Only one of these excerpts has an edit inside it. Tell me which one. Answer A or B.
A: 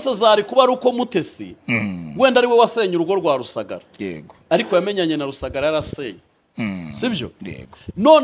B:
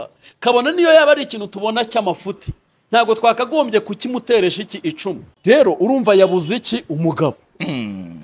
B